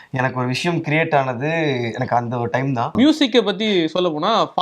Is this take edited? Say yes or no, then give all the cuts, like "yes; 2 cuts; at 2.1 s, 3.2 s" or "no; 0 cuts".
yes; 1 cut; at 2.9 s